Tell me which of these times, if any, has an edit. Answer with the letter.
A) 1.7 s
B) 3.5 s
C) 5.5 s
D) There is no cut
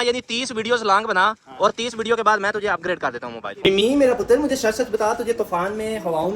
B